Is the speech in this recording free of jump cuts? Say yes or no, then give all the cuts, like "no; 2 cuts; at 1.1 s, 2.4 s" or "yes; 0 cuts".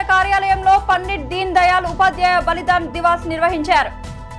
yes; 0 cuts